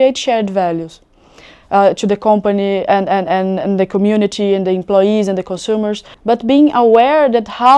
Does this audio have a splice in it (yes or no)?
yes